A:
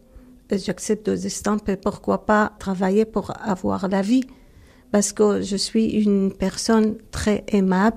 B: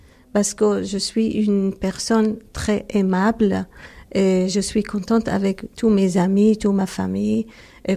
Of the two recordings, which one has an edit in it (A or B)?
A